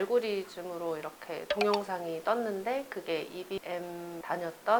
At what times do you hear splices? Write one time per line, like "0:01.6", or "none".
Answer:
none

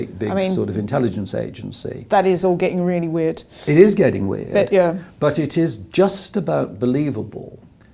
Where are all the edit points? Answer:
none

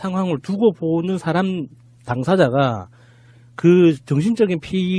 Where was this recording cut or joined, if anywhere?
0:02.1

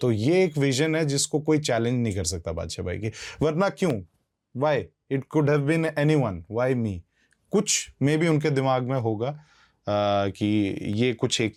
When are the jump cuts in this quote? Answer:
none

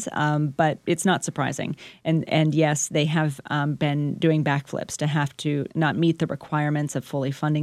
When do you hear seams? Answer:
0:05.7

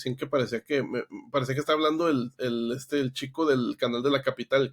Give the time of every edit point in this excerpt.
none

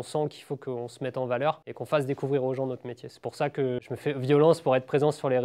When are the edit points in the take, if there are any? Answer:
0:01.7
0:03.8

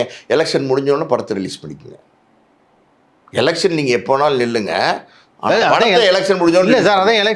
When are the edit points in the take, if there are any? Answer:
none

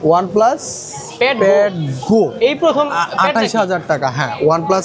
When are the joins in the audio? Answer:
none

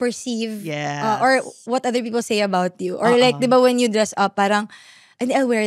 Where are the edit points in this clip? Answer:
none

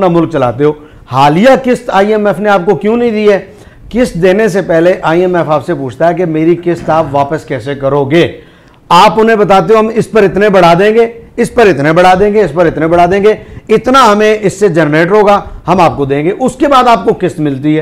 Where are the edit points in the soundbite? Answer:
none

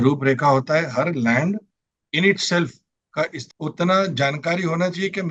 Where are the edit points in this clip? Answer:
0:03.4

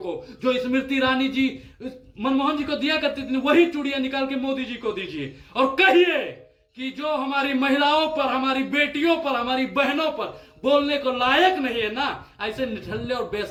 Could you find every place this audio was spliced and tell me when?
none

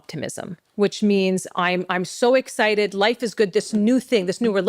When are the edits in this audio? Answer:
none

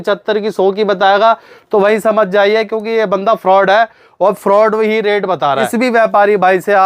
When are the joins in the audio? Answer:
0:05.7

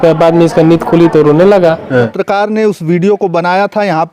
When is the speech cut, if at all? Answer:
0:02.1

